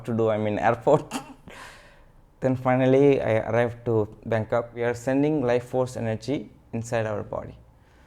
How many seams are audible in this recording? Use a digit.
1